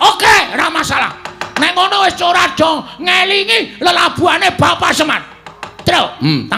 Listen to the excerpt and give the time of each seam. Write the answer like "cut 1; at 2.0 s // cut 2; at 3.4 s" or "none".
none